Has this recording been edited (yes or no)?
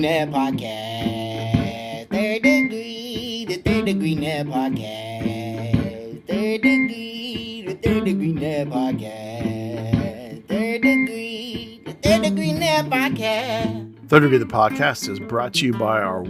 yes